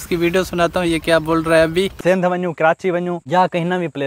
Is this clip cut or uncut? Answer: cut